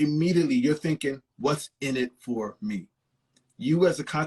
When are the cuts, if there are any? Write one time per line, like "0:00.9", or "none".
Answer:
none